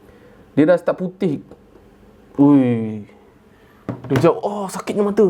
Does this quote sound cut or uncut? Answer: uncut